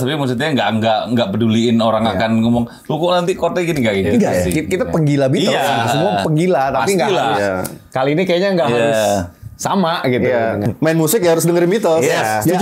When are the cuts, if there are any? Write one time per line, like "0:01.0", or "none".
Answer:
0:10.7

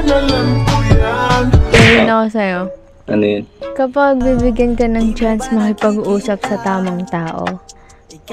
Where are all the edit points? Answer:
0:01.7

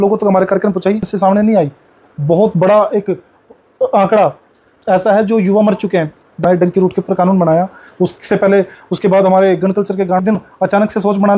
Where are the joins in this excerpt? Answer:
0:01.1
0:06.4
0:10.2

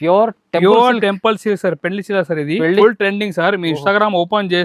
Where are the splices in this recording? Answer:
0:02.8

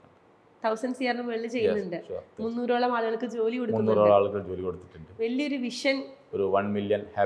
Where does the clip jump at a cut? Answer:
none

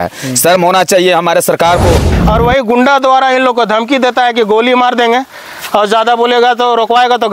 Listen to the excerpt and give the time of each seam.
0:02.1

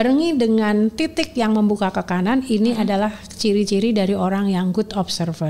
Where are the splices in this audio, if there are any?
none

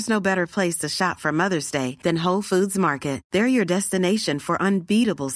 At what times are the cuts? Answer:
none

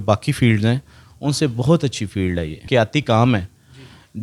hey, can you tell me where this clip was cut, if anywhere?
0:02.6

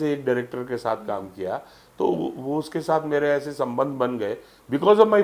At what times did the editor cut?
none

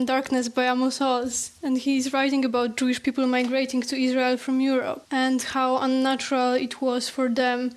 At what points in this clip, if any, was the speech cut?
0:05.0

